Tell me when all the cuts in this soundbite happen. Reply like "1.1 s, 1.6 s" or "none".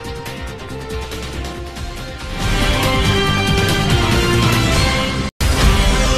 none